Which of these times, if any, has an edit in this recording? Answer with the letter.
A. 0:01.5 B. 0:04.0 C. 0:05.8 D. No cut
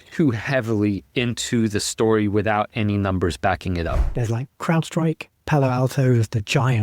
B